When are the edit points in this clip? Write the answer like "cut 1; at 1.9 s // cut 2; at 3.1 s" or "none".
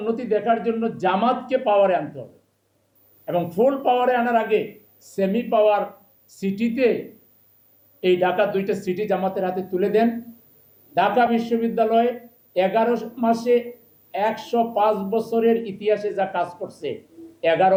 none